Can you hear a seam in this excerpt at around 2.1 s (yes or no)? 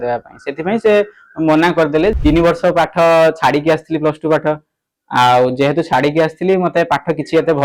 yes